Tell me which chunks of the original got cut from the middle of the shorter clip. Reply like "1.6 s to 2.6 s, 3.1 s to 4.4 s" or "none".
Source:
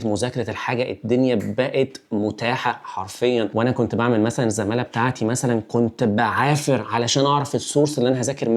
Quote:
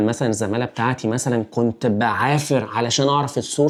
none